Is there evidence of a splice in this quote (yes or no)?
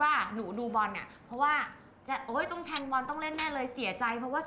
no